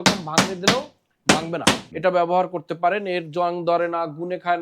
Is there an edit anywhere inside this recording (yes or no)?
yes